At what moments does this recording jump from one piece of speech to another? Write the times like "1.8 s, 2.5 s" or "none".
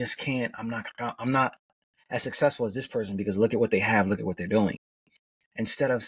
none